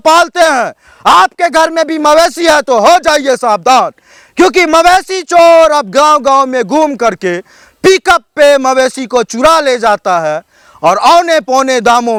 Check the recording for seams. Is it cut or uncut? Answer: uncut